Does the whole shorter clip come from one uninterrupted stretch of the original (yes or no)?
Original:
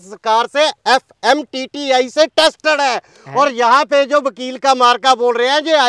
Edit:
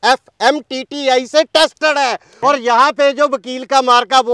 no